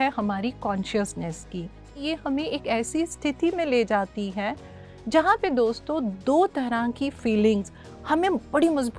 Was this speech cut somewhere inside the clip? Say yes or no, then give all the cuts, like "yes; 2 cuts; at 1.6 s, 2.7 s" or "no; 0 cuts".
yes; 1 cut; at 2.0 s